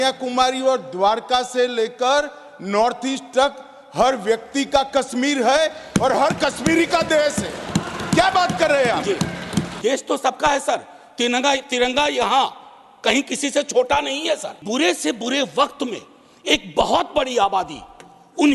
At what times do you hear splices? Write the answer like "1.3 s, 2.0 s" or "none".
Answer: 9.8 s, 14.6 s